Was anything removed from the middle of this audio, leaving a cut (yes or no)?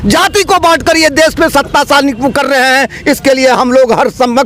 no